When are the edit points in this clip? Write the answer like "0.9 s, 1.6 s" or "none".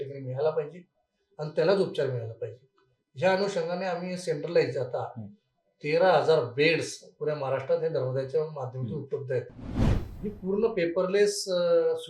9.9 s